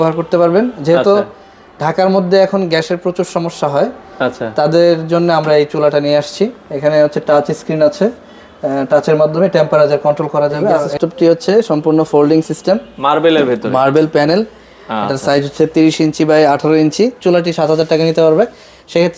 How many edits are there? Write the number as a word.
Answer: two